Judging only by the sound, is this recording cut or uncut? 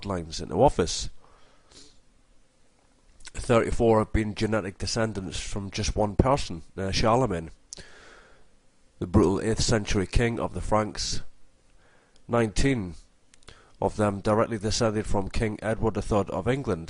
cut